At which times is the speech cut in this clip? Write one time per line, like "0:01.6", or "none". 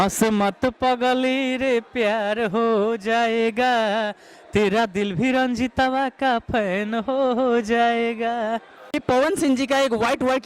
0:09.0